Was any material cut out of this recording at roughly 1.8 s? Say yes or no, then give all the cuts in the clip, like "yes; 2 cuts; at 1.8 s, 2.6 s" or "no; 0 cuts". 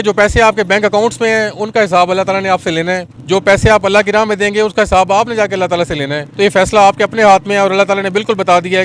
no; 2 cuts; at 3.1 s, 6.2 s